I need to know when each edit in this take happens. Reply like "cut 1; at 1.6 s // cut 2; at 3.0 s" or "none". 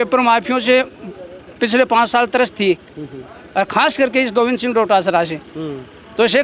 none